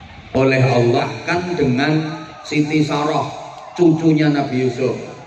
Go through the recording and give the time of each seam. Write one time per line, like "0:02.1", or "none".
0:01.0